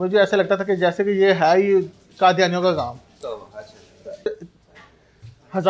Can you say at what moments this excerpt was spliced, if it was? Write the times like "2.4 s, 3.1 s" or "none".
4.3 s